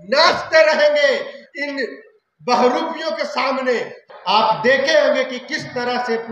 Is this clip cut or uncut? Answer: cut